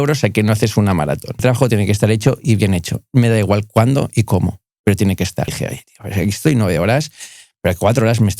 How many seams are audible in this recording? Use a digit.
2